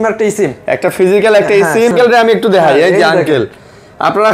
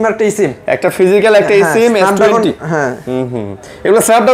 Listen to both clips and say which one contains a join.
first; 1 cut; at 1.9 s

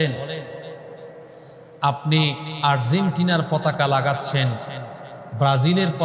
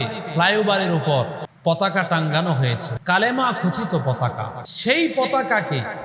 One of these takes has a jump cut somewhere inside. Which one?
second; 3 cuts; at 1.4 s, 2.9 s, 4.6 s

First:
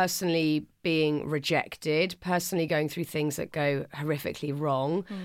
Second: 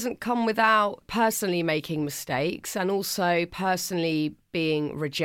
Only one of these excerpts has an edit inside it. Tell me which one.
second; 1 cut; at 1.0 s

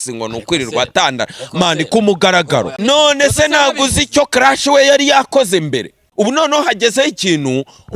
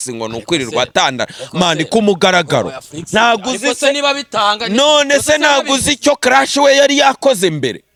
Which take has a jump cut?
first; 2 cuts; at 2.7 s, 6.0 s

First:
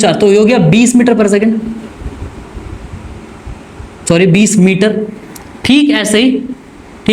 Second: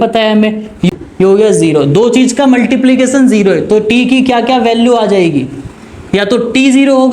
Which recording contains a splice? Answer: second; 1 cut; at 0.9 s

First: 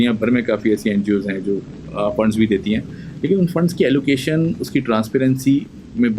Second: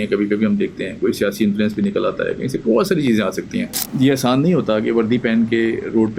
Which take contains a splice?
second; 1 cut; at 3.8 s

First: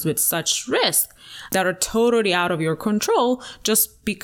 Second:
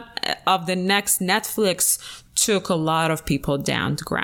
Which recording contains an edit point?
first; 1 cut; at 1.5 s

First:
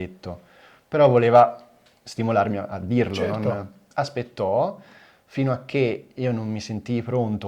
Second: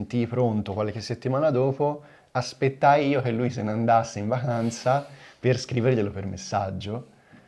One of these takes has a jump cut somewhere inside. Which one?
first; 1 cut; at 3.8 s

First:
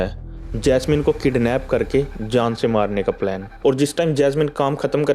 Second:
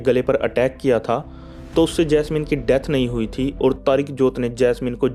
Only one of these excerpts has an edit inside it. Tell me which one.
first; 1 cut; at 3.5 s

